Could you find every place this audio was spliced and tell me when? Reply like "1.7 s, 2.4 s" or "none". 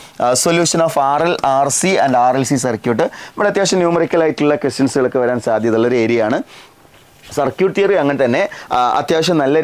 none